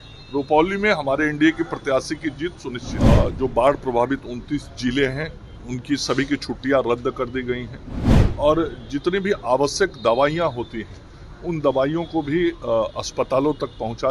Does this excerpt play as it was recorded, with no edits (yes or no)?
no